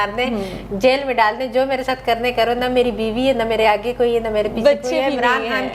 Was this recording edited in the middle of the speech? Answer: no; 0 cuts

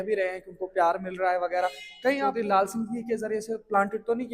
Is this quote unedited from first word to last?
no; 1 cut; at 2.3 s

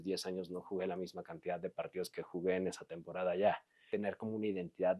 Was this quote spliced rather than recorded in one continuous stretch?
yes; 1 cut; at 3.7 s

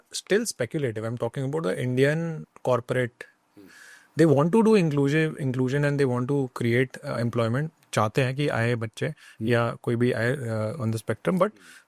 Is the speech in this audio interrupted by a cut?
no; 0 cuts

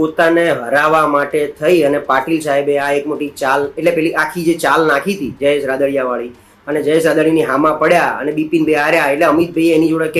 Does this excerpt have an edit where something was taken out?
no; 0 cuts

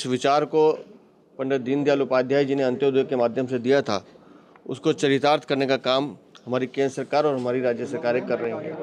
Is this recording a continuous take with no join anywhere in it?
yes; 0 cuts

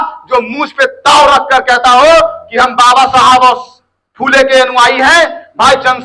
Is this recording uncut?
yes; 0 cuts

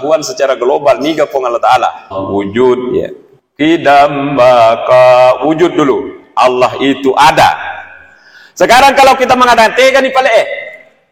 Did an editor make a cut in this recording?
yes; 1 cut; at 2.1 s

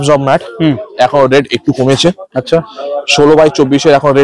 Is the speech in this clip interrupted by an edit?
no; 0 cuts

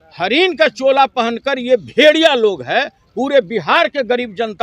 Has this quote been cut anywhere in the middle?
no; 0 cuts

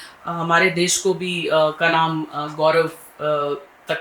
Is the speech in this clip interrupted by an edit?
no; 0 cuts

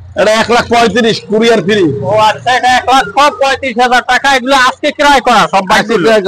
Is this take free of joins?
yes; 0 cuts

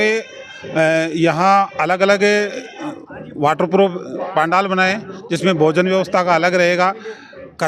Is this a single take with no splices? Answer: yes; 0 cuts

